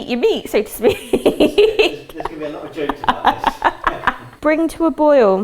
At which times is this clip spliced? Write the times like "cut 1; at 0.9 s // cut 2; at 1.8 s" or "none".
cut 1; at 4.3 s